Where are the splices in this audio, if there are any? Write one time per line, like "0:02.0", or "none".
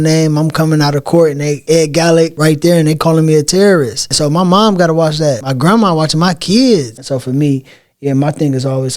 0:01.6
0:02.3
0:04.0
0:05.5
0:07.0